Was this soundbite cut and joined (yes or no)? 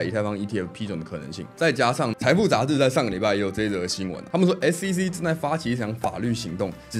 yes